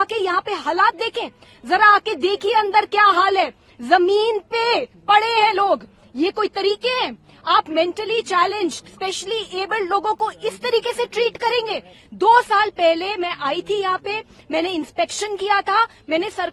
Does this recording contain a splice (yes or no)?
no